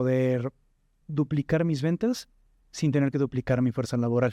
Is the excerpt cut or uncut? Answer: cut